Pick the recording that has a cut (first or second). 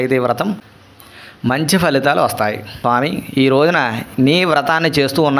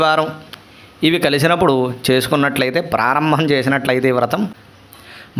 first